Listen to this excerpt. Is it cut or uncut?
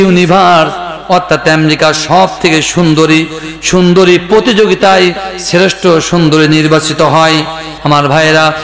cut